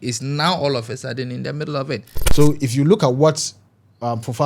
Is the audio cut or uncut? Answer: cut